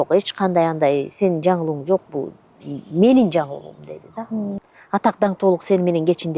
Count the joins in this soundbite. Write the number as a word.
one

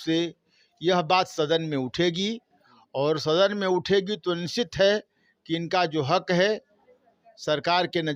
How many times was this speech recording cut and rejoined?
zero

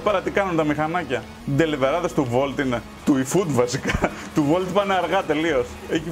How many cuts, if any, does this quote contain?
one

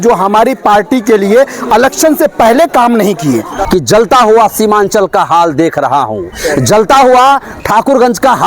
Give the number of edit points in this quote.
one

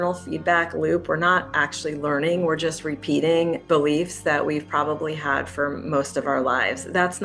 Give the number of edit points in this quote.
one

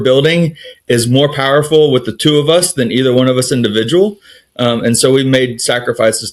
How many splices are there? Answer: zero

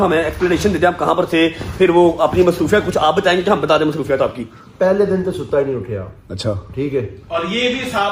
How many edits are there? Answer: zero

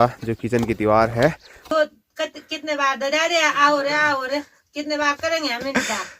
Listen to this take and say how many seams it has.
one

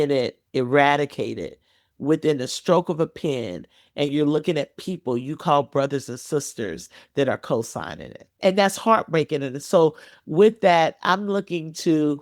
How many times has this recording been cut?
one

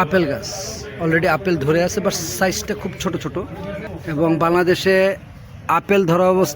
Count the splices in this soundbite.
one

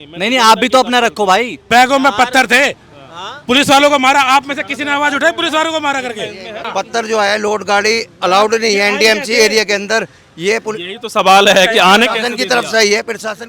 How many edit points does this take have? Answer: two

